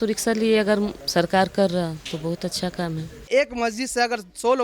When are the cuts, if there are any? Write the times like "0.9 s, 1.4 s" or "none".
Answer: 1.0 s, 3.3 s